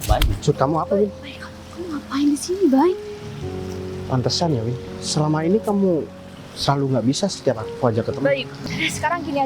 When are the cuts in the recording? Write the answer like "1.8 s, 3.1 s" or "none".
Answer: 8.5 s